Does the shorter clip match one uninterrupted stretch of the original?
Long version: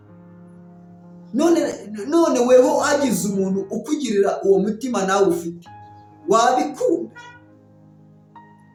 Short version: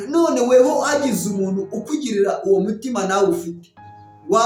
yes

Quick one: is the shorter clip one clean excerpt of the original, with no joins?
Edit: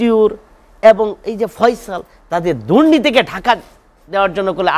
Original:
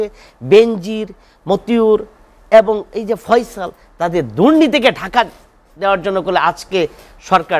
yes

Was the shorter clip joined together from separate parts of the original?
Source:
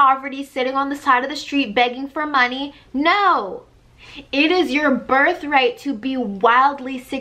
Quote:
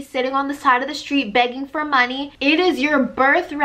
yes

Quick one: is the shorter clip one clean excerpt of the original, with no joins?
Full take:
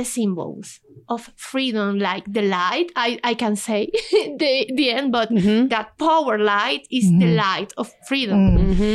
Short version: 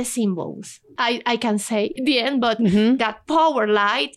no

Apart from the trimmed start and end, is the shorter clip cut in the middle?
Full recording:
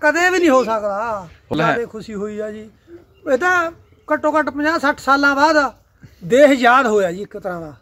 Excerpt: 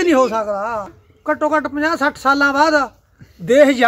yes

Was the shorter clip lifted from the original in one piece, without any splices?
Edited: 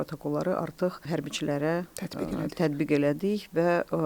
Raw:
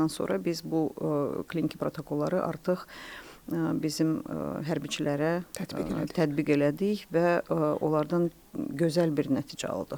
no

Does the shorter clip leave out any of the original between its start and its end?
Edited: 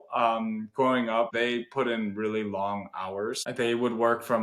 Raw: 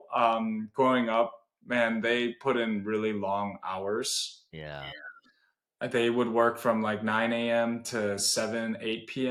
yes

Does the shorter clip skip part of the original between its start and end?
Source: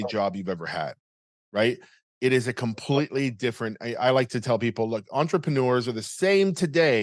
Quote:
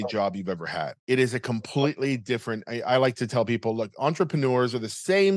yes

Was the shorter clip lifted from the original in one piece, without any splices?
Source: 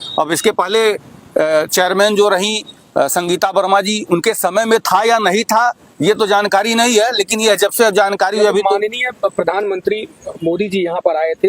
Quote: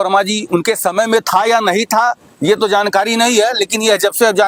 yes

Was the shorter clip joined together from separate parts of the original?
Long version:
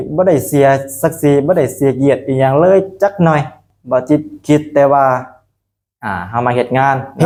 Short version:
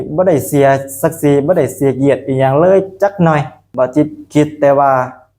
yes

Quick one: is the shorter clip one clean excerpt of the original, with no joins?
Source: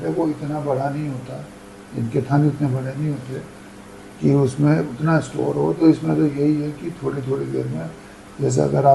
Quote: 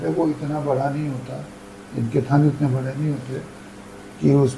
yes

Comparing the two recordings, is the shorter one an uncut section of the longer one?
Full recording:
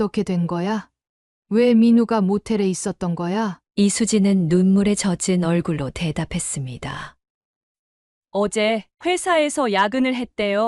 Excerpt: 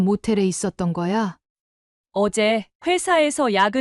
no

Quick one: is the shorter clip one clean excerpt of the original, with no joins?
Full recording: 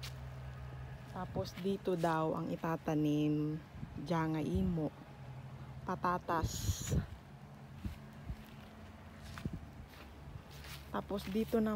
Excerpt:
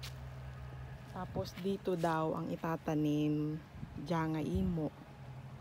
yes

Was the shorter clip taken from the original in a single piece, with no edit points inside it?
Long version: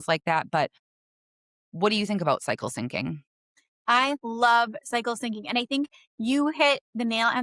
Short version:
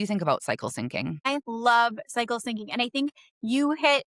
no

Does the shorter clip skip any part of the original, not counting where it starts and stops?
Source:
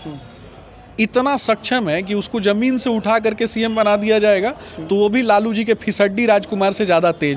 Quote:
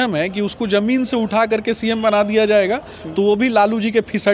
no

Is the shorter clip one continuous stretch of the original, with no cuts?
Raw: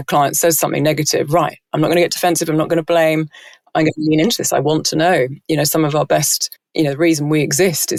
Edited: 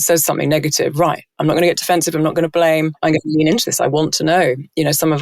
no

